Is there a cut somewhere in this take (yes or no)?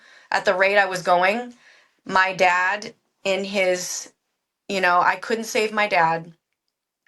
no